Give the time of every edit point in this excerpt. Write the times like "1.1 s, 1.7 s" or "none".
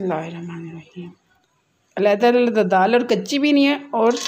1.9 s